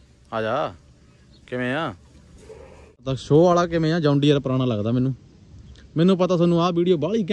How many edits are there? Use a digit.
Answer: 1